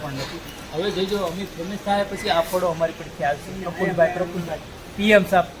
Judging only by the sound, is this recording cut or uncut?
uncut